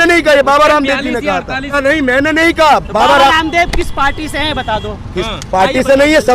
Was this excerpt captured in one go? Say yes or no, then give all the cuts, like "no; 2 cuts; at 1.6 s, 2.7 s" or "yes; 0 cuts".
no; 1 cut; at 1.7 s